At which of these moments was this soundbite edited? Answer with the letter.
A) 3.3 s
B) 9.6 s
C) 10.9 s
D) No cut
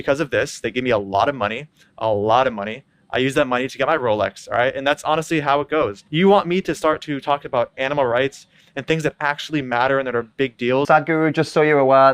C